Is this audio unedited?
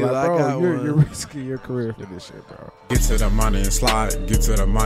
no; 1 cut; at 2.7 s

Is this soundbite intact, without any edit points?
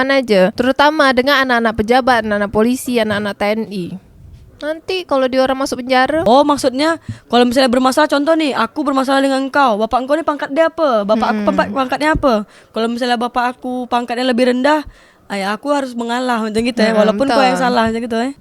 no; 1 cut; at 6.2 s

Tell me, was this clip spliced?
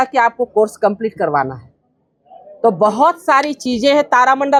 no; 0 cuts

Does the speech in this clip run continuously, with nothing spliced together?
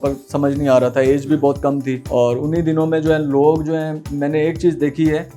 no; 1 cut; at 2.0 s

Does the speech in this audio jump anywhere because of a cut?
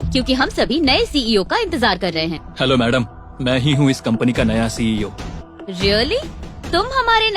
yes; 2 cuts; at 2.4 s, 5.4 s

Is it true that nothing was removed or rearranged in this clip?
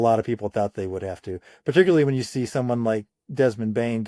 yes; 0 cuts

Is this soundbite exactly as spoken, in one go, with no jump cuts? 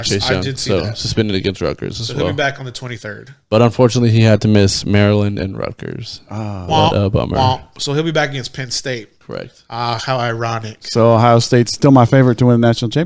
no; 1 cut; at 11.7 s

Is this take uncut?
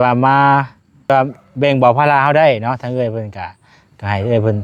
no; 1 cut; at 1.1 s

